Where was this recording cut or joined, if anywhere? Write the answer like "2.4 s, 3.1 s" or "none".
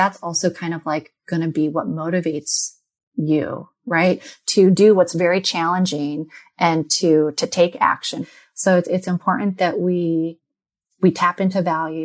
8.2 s